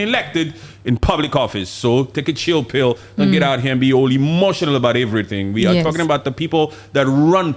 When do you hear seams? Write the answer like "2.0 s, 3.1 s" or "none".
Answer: none